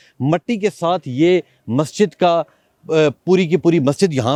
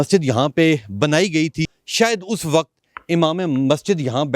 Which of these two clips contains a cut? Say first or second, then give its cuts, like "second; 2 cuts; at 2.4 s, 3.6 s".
second; 1 cut; at 1.8 s